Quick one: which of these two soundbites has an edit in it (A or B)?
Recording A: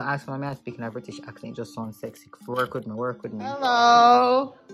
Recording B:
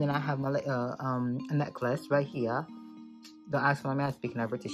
A